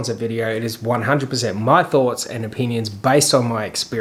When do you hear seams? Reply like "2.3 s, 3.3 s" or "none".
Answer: none